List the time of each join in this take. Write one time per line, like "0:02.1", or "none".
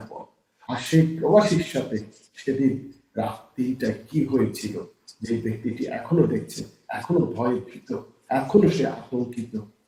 none